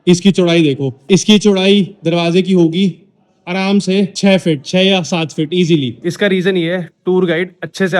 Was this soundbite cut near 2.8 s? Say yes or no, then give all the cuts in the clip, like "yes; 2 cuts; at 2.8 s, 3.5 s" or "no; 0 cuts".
no; 3 cuts; at 0.9 s, 4.1 s, 6.0 s